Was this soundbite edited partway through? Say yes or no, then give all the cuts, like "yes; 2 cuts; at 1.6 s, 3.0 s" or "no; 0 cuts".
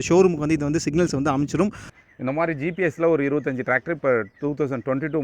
yes; 1 cut; at 1.9 s